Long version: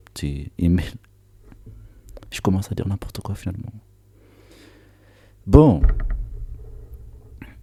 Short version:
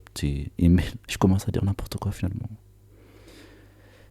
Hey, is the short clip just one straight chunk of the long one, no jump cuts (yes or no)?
no